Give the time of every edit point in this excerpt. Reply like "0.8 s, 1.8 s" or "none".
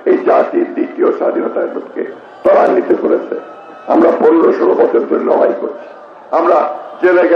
none

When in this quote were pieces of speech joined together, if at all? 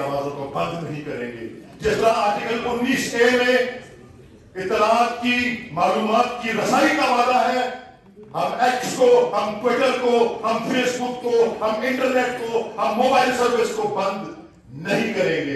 none

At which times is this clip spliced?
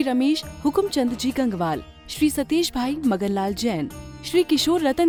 none

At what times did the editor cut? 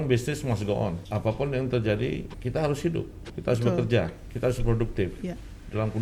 1.0 s, 2.4 s, 3.3 s, 4.3 s

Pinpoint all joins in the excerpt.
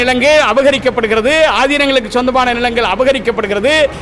none

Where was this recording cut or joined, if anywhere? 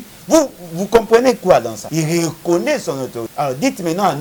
1.8 s, 3.2 s

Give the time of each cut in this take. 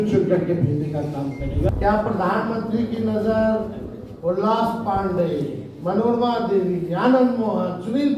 1.7 s

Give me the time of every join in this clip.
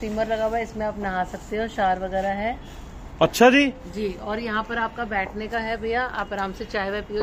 none

